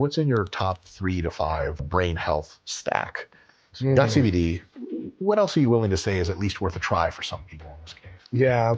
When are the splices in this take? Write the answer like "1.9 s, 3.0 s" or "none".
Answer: 1.9 s